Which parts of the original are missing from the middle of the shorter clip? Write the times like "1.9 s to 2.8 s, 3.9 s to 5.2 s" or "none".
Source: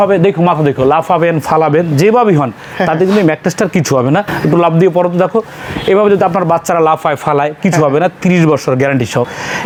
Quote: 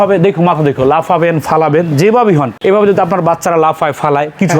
2.5 s to 5.8 s